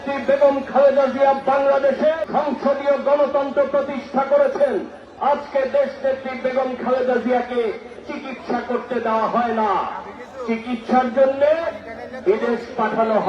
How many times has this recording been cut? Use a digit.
2